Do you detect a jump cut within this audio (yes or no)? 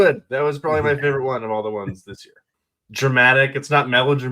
yes